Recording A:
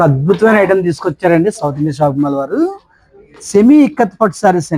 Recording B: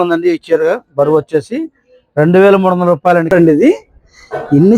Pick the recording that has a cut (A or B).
B